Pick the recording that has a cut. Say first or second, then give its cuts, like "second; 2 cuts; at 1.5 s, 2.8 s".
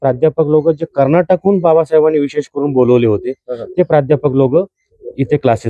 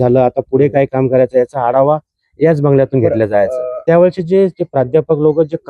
second; 1 cut; at 3.7 s